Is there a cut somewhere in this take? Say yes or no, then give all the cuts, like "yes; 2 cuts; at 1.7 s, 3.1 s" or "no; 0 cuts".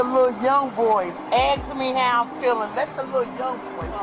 no; 0 cuts